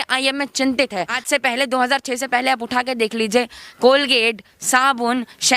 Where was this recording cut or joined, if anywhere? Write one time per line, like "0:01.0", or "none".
0:01.2